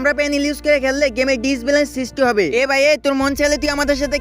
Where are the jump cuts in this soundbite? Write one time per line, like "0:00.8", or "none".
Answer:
0:02.5